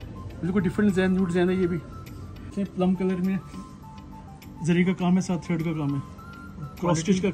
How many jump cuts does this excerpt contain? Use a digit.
1